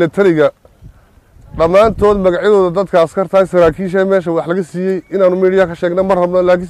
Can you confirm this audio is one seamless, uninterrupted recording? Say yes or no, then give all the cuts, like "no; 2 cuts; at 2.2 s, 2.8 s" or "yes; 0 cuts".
yes; 0 cuts